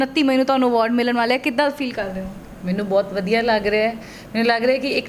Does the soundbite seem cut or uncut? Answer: uncut